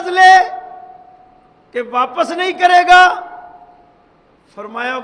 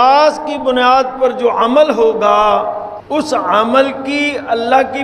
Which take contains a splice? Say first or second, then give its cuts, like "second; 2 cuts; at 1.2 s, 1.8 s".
second; 1 cut; at 2.9 s